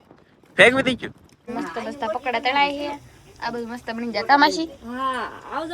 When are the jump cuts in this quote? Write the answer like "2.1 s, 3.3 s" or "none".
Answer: 1.3 s